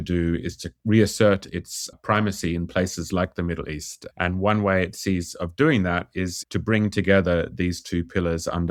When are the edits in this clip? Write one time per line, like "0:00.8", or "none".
none